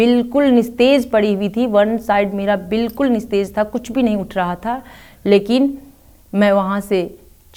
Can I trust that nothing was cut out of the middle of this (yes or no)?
yes